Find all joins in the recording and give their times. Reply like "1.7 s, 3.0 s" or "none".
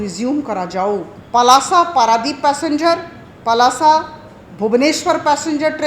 1.2 s